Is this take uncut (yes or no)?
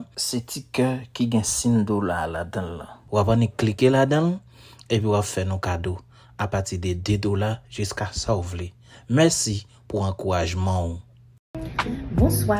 no